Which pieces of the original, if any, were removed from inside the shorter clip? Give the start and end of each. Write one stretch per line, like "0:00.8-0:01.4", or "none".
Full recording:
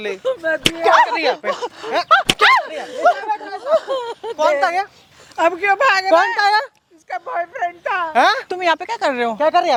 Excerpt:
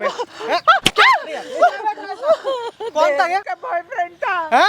0:05.0-0:07.2